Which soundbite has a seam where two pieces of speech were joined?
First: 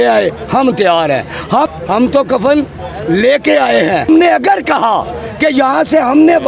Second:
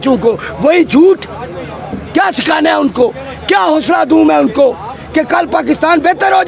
first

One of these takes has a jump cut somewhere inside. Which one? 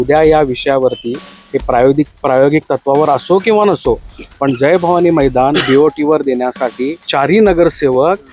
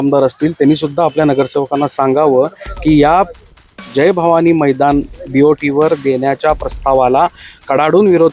first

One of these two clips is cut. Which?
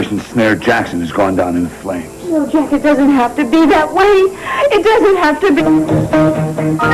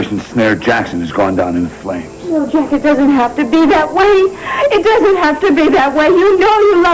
second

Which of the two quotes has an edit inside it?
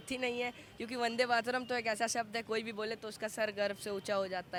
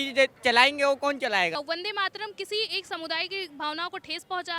second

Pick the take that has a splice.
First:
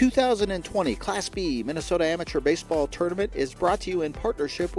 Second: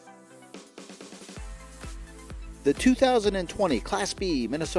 second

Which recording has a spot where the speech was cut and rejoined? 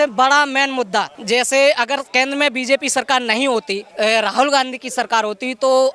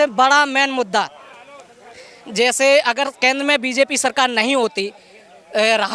first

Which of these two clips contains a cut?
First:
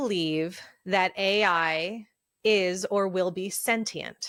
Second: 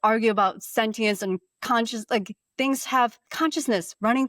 second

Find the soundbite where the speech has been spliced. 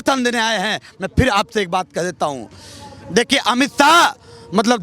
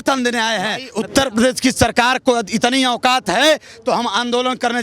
second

